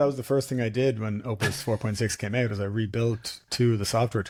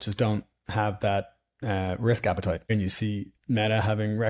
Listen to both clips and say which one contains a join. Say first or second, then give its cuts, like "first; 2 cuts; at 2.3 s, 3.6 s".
second; 1 cut; at 2.7 s